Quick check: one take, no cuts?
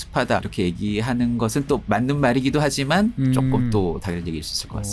no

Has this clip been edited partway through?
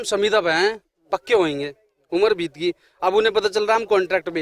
no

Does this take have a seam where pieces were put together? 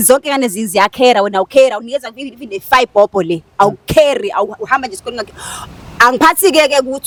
no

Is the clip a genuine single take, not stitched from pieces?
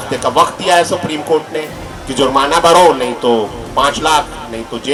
yes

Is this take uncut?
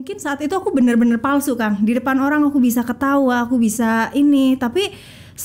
yes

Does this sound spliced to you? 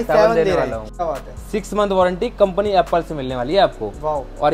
yes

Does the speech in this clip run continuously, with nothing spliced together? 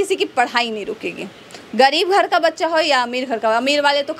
yes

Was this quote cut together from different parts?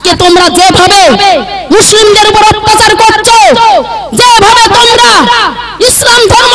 no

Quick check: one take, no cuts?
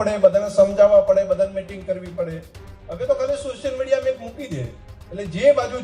yes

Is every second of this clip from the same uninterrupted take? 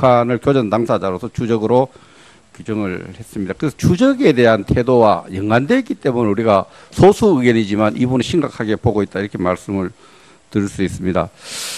yes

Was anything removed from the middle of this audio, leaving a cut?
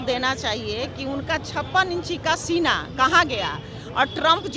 no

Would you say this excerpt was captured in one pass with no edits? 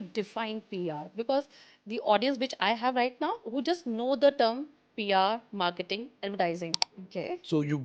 no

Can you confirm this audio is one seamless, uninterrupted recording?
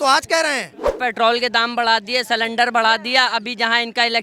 no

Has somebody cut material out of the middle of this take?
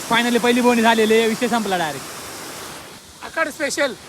yes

